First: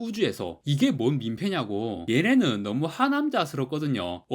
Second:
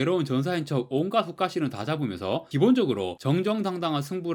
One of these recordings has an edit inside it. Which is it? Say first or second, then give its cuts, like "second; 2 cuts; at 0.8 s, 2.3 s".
first; 1 cut; at 2.0 s